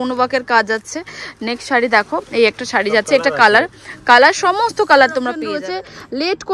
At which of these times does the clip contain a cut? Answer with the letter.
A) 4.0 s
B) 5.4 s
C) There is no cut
B